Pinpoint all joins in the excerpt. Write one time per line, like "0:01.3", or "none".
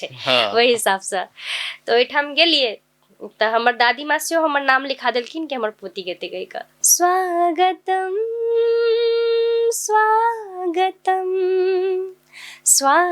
0:06.8